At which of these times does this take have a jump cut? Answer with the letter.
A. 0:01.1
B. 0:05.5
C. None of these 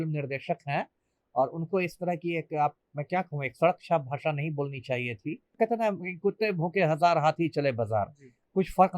B